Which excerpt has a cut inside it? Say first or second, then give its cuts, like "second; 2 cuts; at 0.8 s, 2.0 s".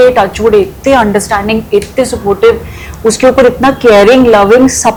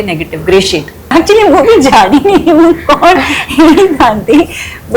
second; 1 cut; at 1.1 s